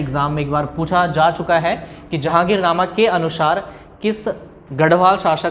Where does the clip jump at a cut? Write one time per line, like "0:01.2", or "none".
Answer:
0:02.2